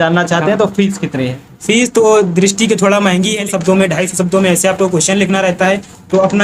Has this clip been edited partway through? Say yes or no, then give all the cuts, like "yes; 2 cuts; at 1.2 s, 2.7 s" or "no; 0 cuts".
yes; 1 cut; at 3.4 s